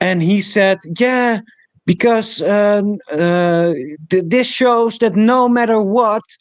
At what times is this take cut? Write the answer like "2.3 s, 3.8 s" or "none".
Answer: none